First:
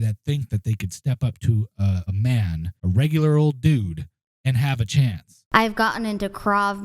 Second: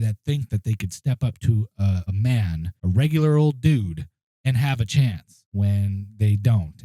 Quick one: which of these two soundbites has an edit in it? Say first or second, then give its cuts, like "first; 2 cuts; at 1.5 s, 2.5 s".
first; 1 cut; at 5.4 s